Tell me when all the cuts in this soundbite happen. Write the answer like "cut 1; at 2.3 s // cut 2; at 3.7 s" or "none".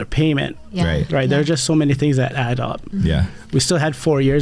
none